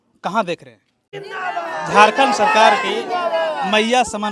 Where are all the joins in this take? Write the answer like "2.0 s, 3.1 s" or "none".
1.2 s